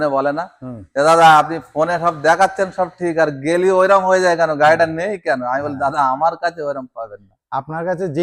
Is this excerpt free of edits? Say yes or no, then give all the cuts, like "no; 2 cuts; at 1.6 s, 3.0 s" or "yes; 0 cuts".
yes; 0 cuts